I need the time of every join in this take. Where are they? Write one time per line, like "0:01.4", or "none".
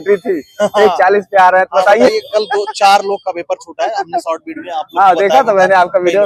none